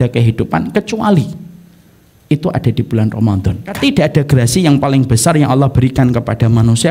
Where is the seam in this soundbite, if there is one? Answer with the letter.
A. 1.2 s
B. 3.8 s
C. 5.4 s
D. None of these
B